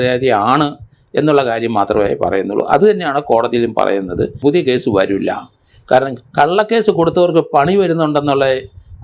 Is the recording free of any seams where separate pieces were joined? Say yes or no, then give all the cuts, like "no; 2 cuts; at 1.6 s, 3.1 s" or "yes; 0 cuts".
no; 1 cut; at 4.4 s